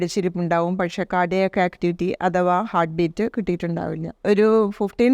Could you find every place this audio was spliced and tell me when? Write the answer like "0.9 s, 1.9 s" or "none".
4.1 s

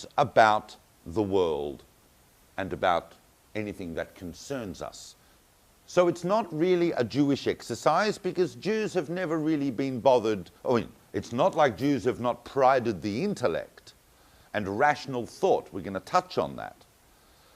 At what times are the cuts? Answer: 2.5 s

